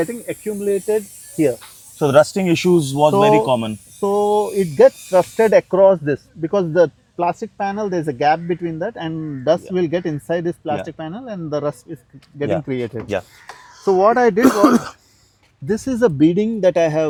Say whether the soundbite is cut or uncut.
uncut